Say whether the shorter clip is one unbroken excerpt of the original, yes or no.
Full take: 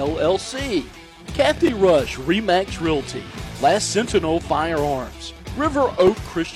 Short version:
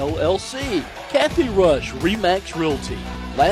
no